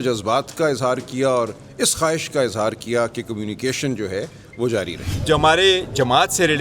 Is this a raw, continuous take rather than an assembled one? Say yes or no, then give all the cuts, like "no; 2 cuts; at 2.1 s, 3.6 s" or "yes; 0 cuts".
no; 1 cut; at 5.2 s